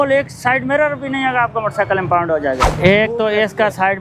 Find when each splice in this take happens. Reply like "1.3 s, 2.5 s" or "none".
2.7 s